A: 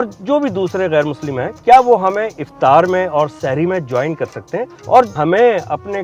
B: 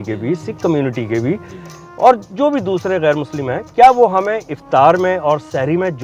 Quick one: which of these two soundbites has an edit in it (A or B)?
A